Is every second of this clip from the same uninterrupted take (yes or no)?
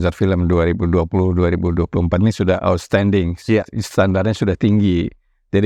yes